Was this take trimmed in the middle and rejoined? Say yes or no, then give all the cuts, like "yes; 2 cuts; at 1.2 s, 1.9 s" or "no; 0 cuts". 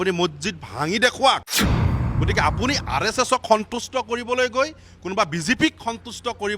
yes; 1 cut; at 1.9 s